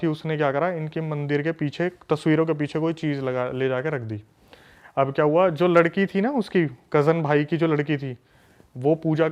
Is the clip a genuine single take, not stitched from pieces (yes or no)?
yes